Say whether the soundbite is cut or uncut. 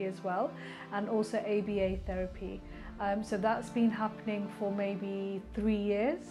uncut